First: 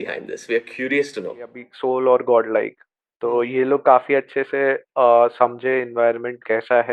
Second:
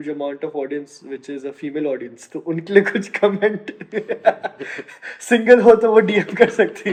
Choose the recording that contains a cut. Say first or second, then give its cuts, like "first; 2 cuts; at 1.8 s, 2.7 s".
first; 1 cut; at 1.7 s